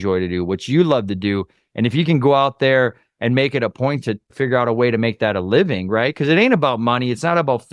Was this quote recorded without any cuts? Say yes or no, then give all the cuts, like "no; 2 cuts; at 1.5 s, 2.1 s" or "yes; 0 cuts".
no; 1 cut; at 4.3 s